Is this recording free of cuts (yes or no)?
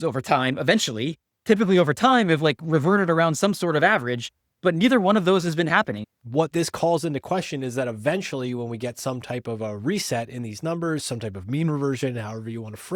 no